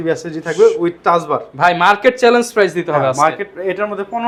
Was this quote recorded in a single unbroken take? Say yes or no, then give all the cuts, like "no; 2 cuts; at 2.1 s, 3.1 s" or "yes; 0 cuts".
yes; 0 cuts